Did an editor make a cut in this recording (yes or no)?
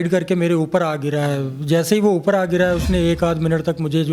no